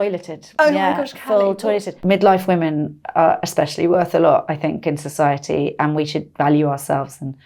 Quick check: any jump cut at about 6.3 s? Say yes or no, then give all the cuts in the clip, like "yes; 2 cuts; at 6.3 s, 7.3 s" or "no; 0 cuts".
no; 1 cut; at 2.0 s